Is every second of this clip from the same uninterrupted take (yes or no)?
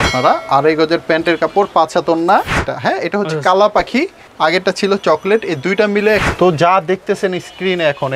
no